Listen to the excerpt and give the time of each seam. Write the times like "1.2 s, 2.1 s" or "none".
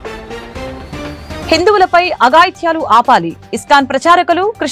none